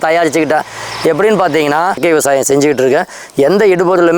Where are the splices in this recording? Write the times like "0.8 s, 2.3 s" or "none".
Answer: 2.0 s